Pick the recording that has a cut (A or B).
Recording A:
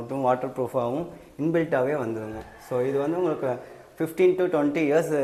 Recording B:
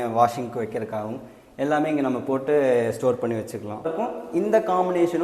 B